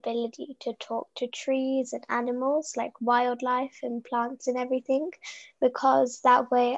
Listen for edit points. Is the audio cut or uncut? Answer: uncut